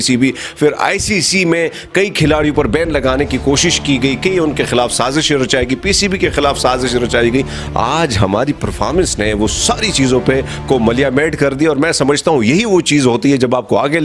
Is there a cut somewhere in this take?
no; 0 cuts

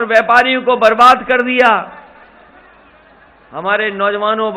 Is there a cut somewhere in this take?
no; 0 cuts

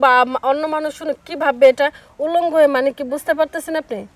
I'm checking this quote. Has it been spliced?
no; 0 cuts

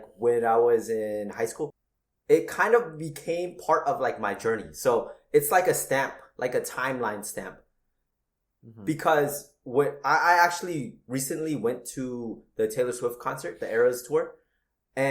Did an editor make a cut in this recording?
yes; 1 cut; at 1.8 s

